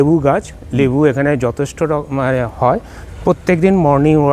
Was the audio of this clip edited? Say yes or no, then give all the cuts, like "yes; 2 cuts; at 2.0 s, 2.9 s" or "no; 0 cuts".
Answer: yes; 1 cut; at 3.0 s